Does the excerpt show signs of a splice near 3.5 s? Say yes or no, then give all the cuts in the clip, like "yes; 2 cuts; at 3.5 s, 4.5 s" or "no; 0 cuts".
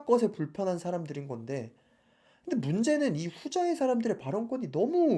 no; 0 cuts